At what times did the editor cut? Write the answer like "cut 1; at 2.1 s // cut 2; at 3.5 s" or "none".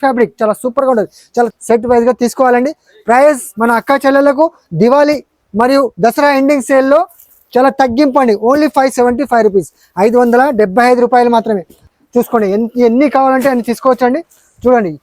cut 1; at 1.5 s // cut 2; at 11.9 s